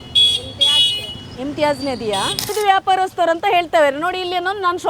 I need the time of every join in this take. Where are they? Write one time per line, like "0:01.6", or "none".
0:02.5